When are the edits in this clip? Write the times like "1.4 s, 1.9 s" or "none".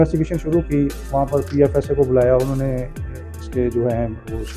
none